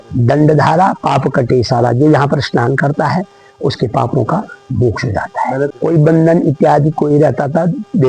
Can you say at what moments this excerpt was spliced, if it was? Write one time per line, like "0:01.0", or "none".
0:05.7